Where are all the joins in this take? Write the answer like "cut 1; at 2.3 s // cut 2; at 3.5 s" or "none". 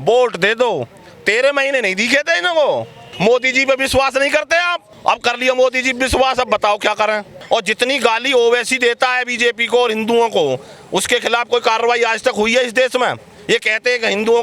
cut 1; at 3.0 s // cut 2; at 4.9 s // cut 3; at 7.3 s